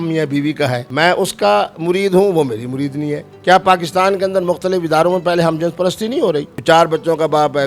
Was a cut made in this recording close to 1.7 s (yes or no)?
no